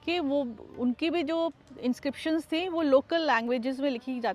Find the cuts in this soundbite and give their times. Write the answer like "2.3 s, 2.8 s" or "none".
none